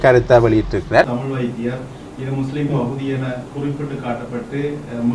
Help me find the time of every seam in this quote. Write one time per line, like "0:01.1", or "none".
0:01.0